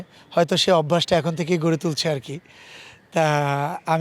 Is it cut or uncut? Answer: uncut